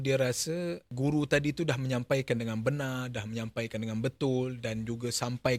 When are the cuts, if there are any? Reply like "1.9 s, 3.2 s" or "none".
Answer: 0.9 s